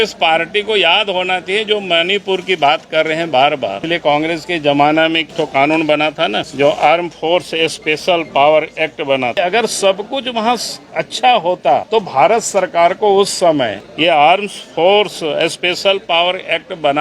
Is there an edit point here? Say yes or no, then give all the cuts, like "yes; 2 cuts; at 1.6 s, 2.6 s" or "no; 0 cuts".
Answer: yes; 6 cuts; at 3.8 s, 5.3 s, 6.5 s, 9.4 s, 11.9 s, 13.8 s